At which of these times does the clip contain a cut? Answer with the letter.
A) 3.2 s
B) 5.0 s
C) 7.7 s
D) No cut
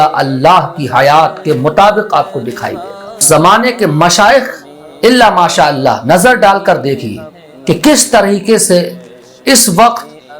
A